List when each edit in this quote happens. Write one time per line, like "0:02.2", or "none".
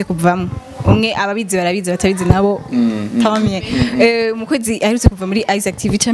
none